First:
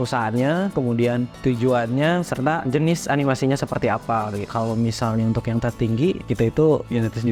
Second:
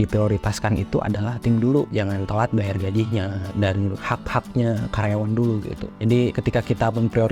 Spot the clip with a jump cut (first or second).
second